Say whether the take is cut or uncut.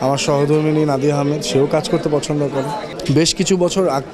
cut